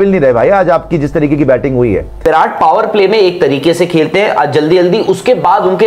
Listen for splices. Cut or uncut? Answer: cut